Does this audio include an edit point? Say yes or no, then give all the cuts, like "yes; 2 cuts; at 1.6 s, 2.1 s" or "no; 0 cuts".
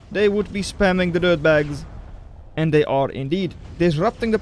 no; 0 cuts